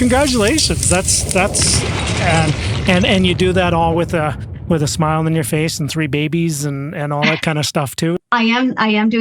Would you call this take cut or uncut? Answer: cut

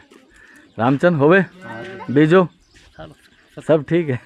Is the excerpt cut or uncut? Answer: uncut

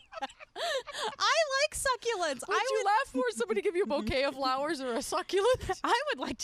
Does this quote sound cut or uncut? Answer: uncut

